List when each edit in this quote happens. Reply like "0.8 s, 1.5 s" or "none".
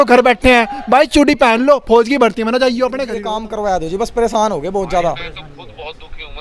3.3 s

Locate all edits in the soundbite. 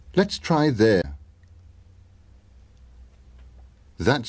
1.0 s

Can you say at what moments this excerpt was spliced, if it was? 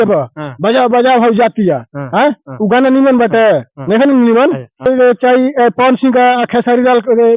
4.8 s

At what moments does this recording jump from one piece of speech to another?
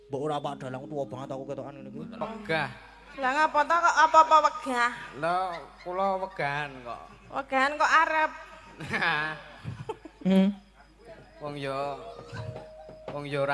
2.2 s

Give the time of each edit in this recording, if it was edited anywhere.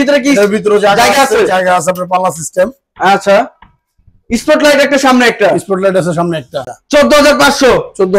6.6 s

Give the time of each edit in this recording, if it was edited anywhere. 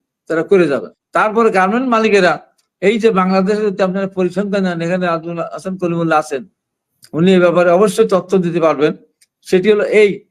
1.0 s

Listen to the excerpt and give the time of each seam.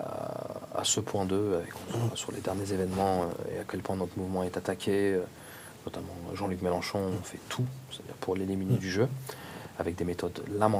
none

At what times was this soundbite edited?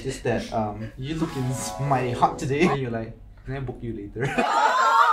0.9 s, 2.7 s

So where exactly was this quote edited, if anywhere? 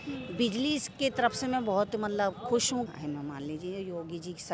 2.9 s

